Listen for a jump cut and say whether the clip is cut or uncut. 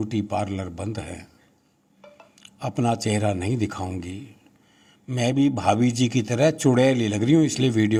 uncut